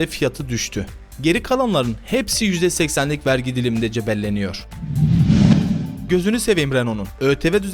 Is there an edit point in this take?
yes; 2 cuts; at 4.8 s, 5.9 s

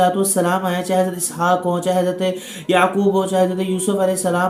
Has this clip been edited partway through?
no; 0 cuts

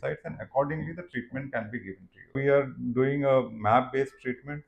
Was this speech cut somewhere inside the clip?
yes; 1 cut; at 2.4 s

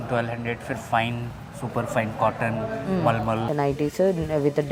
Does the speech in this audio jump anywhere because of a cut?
yes; 1 cut; at 3.5 s

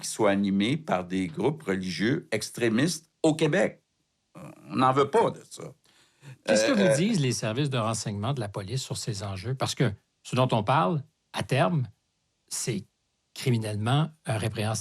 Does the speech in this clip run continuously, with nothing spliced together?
yes; 0 cuts

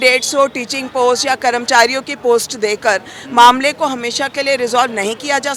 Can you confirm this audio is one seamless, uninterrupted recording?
yes; 0 cuts

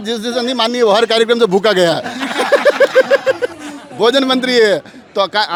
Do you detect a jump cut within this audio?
no; 0 cuts

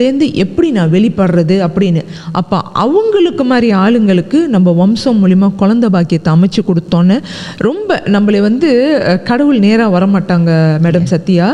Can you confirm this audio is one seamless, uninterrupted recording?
yes; 0 cuts

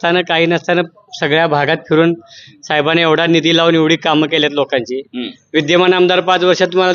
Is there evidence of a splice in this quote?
no; 0 cuts

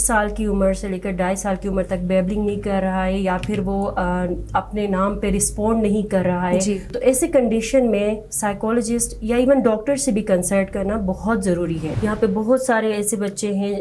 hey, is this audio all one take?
no; 2 cuts; at 6.9 s, 11.9 s

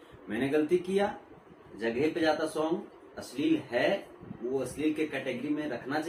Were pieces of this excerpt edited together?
no; 0 cuts

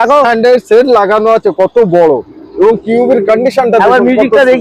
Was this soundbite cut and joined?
no; 0 cuts

